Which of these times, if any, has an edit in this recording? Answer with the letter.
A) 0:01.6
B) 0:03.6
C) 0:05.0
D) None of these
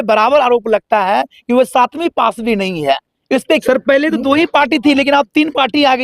B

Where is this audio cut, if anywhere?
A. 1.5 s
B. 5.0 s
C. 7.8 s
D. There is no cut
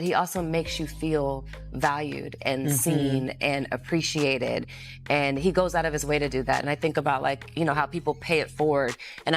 D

